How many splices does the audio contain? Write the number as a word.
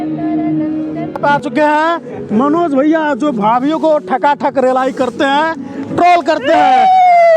one